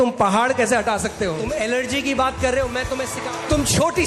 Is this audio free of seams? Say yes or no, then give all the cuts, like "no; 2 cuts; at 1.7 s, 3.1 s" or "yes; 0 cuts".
no; 2 cuts; at 1.4 s, 3.1 s